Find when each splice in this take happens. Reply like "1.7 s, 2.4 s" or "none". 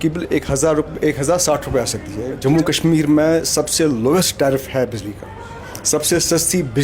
2.3 s